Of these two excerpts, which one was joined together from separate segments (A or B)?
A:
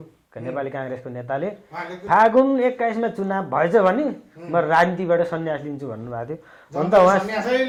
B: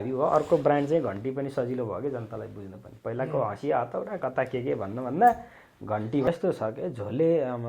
B